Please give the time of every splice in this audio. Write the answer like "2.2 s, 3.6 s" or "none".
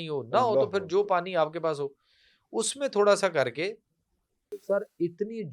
4.6 s